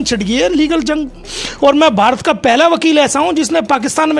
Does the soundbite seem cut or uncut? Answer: cut